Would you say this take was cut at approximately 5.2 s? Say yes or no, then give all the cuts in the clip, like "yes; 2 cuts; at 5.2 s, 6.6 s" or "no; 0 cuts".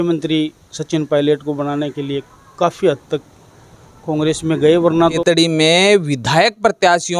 yes; 1 cut; at 5.2 s